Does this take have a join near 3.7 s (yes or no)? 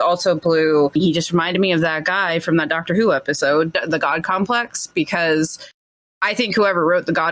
yes